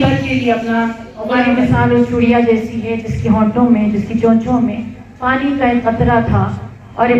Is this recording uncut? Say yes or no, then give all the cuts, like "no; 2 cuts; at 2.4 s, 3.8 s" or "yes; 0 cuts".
no; 1 cut; at 1.6 s